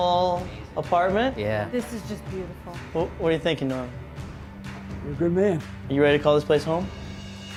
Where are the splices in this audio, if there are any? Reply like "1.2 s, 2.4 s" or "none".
none